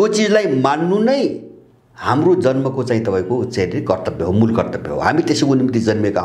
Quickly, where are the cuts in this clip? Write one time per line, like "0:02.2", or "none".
none